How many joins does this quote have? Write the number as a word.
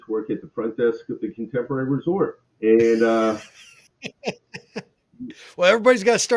one